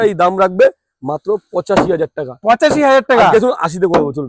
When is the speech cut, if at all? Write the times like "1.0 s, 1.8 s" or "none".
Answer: none